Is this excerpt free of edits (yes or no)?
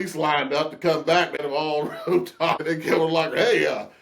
no